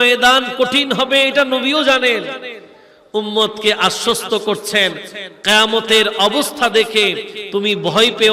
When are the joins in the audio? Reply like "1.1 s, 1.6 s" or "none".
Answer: none

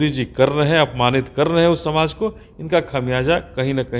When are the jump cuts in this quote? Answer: none

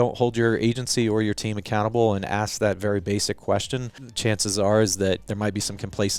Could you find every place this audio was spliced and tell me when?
4.1 s, 5.2 s

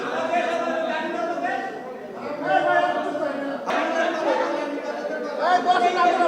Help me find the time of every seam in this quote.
3.7 s

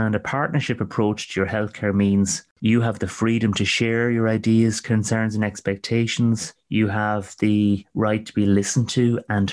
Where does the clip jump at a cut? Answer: 2.4 s, 6.5 s, 7.9 s

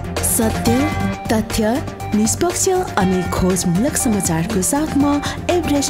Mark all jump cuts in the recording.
none

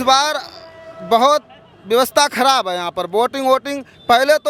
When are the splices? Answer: none

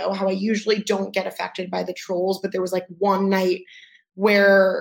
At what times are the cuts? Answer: none

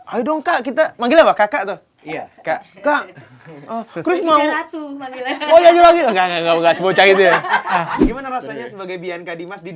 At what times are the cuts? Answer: 8.1 s

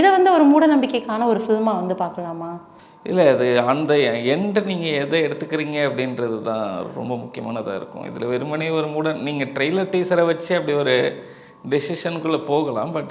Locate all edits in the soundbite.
none

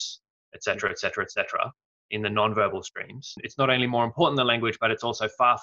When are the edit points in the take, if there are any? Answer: 3.4 s

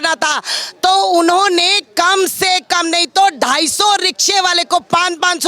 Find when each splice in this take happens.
none

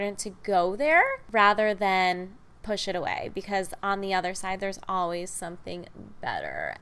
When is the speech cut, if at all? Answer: 1.2 s

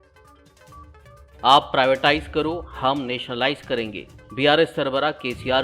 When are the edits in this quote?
1.2 s

